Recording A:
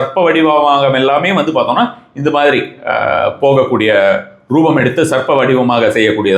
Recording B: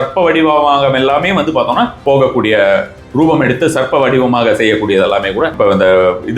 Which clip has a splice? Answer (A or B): B